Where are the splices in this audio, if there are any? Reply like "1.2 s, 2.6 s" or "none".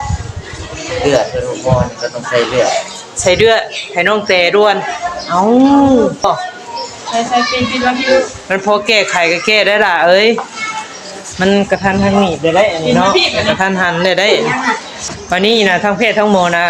6.2 s, 15.0 s